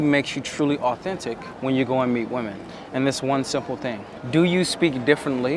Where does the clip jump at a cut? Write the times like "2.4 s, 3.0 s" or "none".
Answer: 1.5 s, 2.7 s, 4.1 s